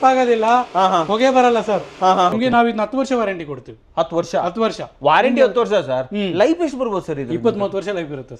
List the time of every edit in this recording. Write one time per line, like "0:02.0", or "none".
0:02.3